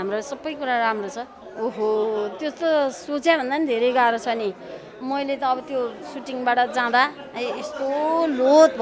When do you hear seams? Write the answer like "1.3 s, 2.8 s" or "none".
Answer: 1.4 s